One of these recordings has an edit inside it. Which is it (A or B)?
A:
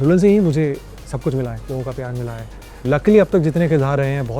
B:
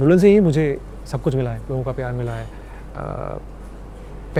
A